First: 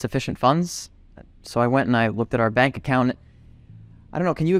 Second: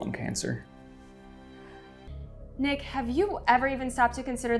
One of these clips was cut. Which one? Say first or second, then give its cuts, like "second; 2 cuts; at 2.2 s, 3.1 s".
second; 1 cut; at 2.0 s